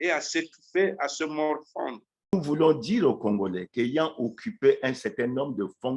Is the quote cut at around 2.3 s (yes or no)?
yes